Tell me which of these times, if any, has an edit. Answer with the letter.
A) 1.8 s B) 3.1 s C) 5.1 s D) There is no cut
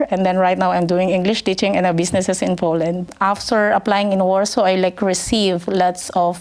B